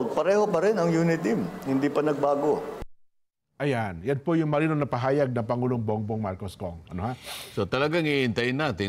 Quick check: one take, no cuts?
yes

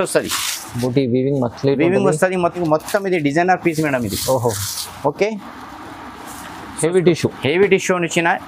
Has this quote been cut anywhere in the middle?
yes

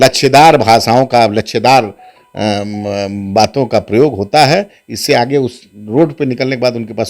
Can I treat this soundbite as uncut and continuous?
yes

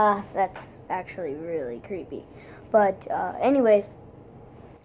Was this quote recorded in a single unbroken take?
no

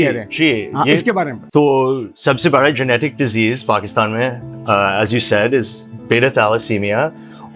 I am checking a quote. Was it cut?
no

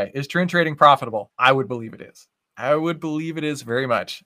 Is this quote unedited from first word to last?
no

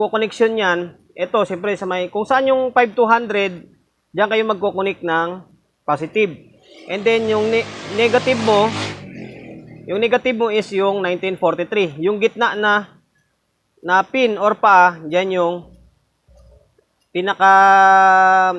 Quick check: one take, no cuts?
yes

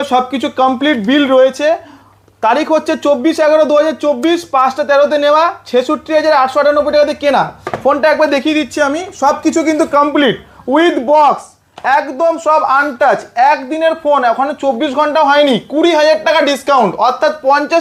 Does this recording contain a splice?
no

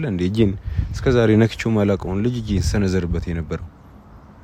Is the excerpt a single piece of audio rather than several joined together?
yes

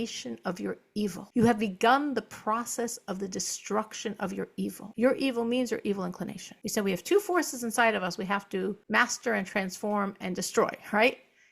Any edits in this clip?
yes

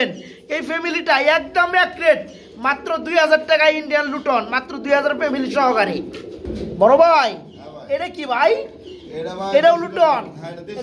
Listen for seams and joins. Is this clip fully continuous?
yes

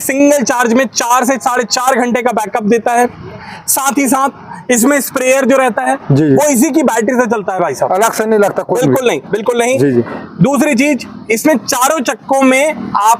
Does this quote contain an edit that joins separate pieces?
no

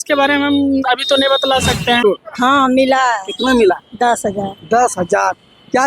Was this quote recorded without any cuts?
no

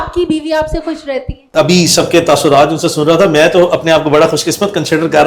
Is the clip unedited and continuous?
no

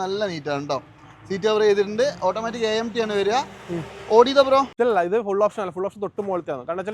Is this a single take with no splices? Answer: no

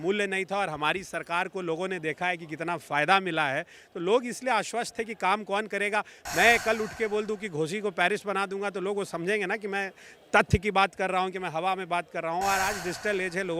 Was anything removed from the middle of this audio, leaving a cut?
no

